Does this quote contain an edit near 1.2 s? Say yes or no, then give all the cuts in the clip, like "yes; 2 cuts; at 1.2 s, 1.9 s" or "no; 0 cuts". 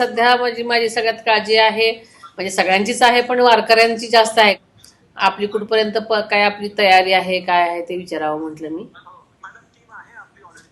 no; 1 cut; at 4.6 s